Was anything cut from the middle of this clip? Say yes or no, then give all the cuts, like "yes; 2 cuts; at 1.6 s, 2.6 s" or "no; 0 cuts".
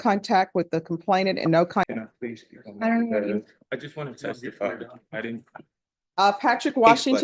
yes; 1 cut; at 1.9 s